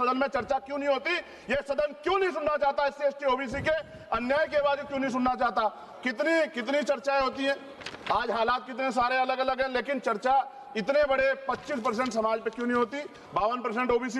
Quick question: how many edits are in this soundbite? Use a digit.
0